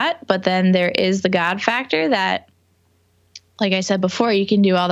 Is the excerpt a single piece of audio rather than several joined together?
yes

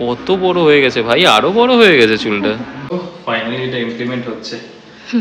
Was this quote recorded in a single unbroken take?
no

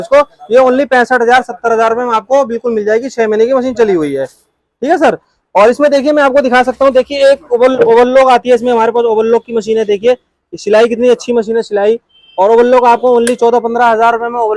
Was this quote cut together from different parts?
no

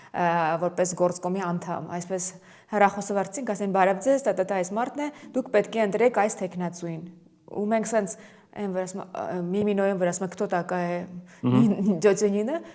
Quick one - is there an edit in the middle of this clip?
no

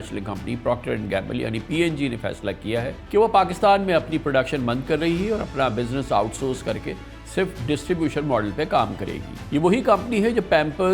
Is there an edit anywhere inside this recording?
no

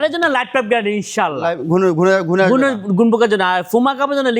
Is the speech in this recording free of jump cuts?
yes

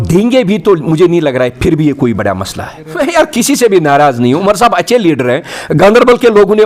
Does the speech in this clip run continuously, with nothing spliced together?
no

